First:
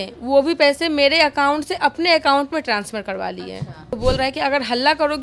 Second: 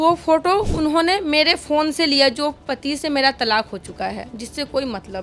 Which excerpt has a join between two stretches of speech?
first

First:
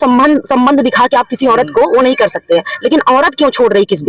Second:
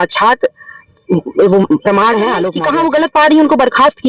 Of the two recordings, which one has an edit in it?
second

